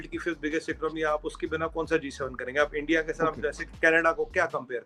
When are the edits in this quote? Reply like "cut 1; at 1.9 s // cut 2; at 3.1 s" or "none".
none